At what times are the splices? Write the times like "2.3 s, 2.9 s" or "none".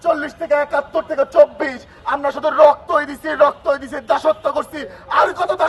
none

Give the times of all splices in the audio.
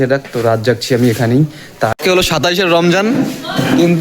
1.9 s

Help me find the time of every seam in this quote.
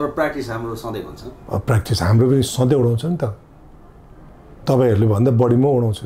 none

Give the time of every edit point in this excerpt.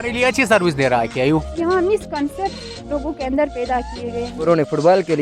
1.5 s, 4.5 s

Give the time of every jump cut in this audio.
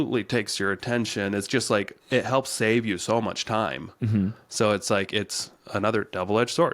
2.0 s

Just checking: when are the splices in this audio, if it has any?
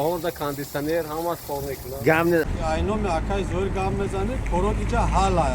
2.5 s

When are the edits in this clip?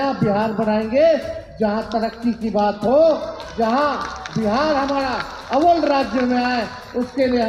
none

